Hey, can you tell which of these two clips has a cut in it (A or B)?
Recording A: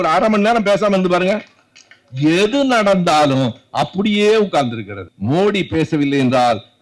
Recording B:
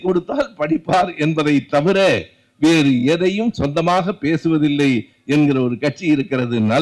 A